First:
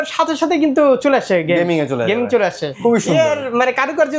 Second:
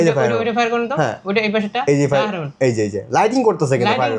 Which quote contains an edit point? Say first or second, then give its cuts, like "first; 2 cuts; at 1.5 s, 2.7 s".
first; 1 cut; at 2.7 s